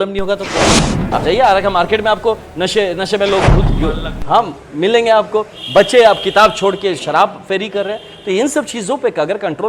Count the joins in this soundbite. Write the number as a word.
one